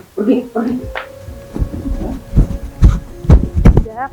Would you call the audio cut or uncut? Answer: uncut